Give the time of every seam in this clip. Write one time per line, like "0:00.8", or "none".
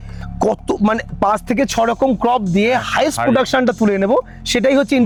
none

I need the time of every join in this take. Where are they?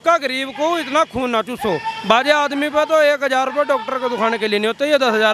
none

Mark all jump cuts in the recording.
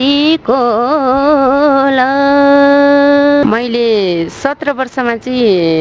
0:03.4

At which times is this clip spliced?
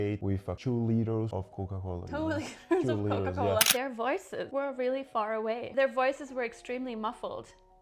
0:03.7

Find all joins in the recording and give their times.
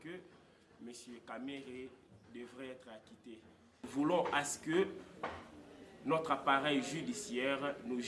0:03.8

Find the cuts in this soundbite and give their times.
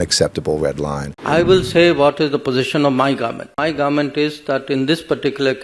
0:01.1
0:03.6

